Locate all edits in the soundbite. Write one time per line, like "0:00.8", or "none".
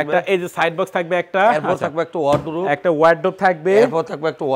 none